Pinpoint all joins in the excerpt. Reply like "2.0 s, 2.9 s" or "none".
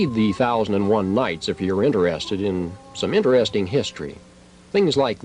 1.9 s